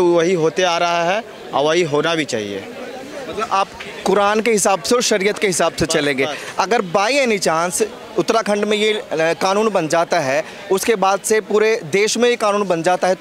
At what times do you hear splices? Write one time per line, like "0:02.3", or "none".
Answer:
none